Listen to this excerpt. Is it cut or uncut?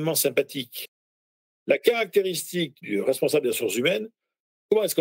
uncut